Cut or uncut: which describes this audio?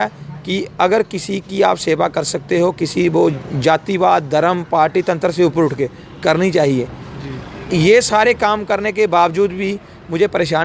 uncut